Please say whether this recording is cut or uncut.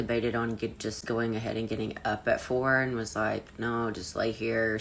cut